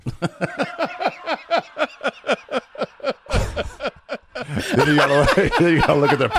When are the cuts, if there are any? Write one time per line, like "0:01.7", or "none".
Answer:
none